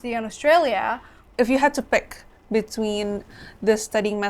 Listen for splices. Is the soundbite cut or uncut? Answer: cut